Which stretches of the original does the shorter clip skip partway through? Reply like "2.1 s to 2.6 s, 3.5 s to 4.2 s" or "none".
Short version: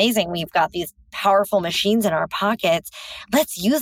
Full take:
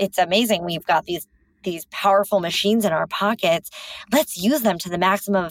1.4 s to 1.8 s